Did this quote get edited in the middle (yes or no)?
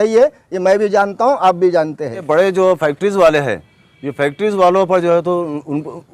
yes